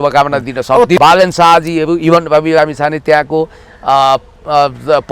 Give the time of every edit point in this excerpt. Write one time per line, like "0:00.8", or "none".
0:01.0